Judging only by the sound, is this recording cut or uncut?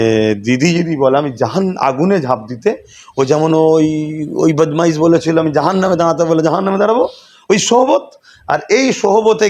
uncut